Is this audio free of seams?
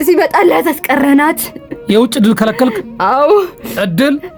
yes; 0 cuts

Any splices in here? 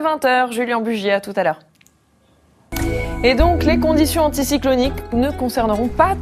yes; 1 cut; at 1.0 s

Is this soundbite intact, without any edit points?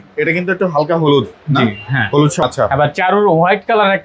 no; 1 cut; at 2.4 s

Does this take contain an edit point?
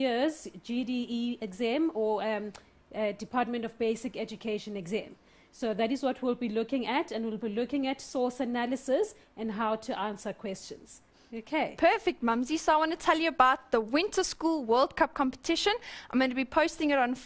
no; 0 cuts

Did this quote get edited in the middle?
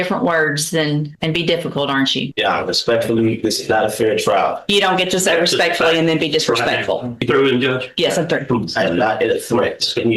yes; 3 cuts; at 1.1 s, 2.3 s, 7.2 s

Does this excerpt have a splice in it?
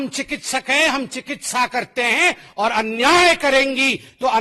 no; 0 cuts

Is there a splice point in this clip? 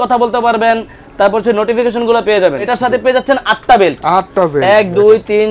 yes; 1 cut; at 2.7 s

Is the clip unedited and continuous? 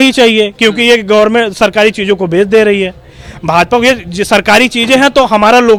yes; 0 cuts

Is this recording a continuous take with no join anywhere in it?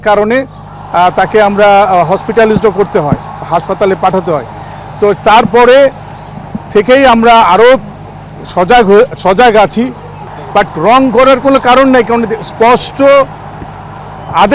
no; 1 cut; at 10.2 s

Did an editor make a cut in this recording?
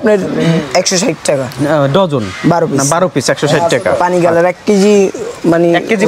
yes; 1 cut; at 4.0 s

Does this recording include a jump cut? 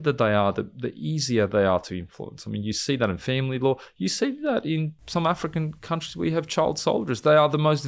yes; 1 cut; at 5.0 s

